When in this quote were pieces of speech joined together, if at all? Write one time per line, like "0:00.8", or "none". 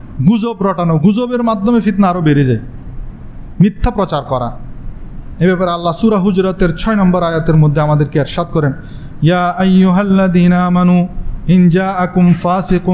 none